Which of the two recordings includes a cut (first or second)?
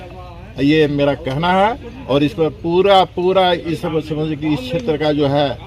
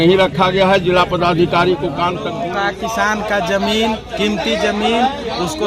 second